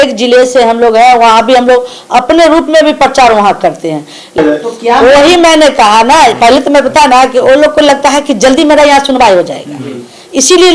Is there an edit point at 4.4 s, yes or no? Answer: yes